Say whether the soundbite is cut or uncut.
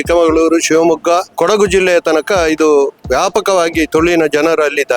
cut